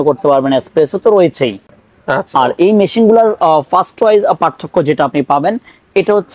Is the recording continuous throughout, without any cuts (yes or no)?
yes